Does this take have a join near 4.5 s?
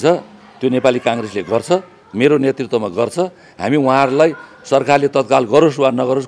no; 0 cuts

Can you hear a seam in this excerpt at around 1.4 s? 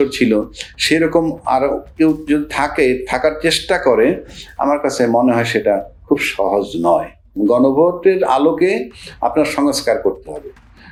no; 0 cuts

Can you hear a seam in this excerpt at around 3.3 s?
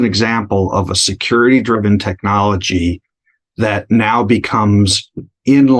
no; 0 cuts

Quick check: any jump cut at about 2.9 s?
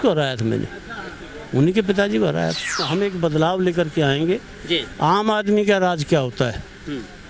yes; 1 cut; at 2.9 s

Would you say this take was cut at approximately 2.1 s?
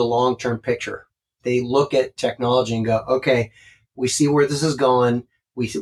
yes; 1 cut; at 2.1 s

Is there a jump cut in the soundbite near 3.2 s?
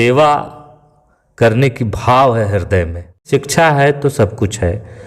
yes; 1 cut; at 3.2 s

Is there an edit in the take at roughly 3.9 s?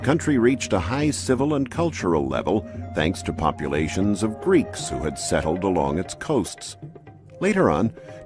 no; 0 cuts

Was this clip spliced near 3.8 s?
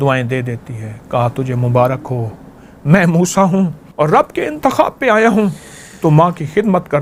yes; 1 cut; at 3.8 s

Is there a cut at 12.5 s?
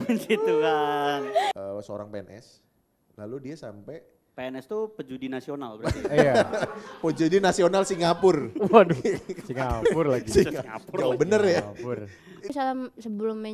yes; 2 cuts; at 1.5 s, 12.5 s

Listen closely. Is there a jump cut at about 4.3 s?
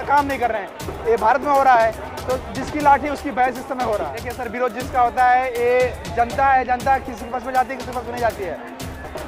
yes; 1 cut; at 4.3 s

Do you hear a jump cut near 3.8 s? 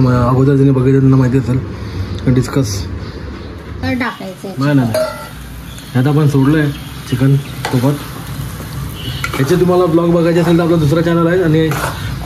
yes; 1 cut; at 3.8 s

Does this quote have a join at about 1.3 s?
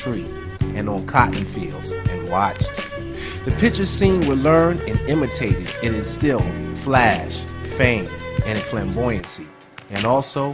no; 1 cut; at 7.8 s

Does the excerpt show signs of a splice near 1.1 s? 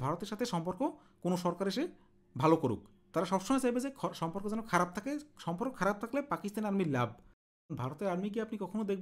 no; 1 cut; at 7.4 s

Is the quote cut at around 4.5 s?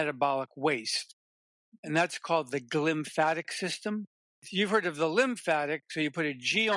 yes; 1 cut; at 4.5 s

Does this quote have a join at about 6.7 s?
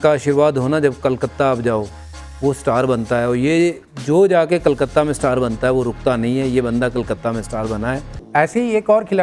no; 1 cut; at 8.1 s

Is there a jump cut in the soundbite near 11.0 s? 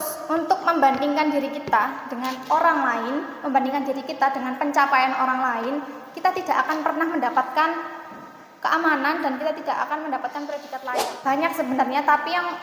yes; 1 cut; at 11.0 s

